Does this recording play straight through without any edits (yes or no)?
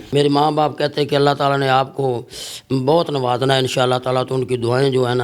yes